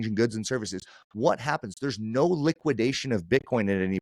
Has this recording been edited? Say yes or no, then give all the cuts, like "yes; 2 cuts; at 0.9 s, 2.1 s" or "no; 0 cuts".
no; 0 cuts